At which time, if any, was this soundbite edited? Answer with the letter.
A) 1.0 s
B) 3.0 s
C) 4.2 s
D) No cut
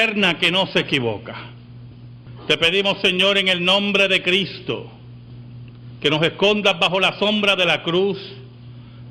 B